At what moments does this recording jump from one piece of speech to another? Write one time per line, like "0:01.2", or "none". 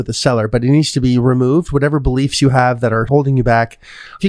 0:03.0